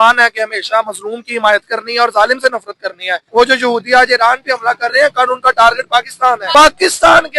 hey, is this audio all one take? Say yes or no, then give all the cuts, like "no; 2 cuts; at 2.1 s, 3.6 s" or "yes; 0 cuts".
no; 2 cuts; at 3.1 s, 6.4 s